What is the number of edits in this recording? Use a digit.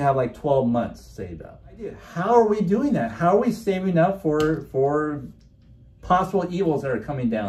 1